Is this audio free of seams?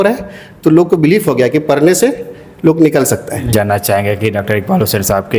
no; 1 cut; at 3.5 s

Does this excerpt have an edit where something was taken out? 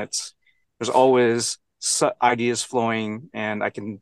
no; 0 cuts

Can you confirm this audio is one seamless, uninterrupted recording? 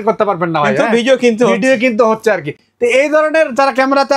yes; 0 cuts

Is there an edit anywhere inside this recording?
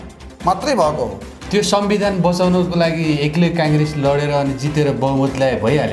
yes; 1 cut; at 1.3 s

